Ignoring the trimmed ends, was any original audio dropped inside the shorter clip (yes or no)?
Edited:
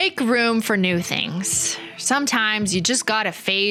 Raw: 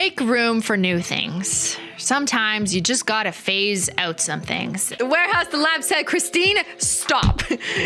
no